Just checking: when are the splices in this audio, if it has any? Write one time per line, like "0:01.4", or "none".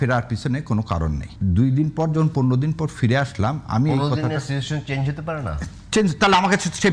0:01.3